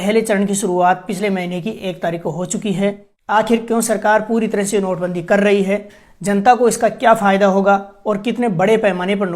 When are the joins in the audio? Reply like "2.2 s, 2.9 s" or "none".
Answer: 3.1 s